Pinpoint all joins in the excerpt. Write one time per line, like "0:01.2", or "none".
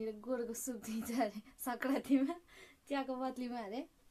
none